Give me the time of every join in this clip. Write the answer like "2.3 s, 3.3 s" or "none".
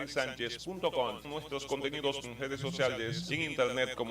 1.3 s, 2.2 s, 3.2 s